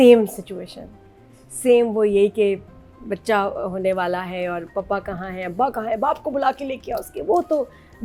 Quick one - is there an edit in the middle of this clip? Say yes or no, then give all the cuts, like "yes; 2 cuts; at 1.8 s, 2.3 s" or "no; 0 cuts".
no; 0 cuts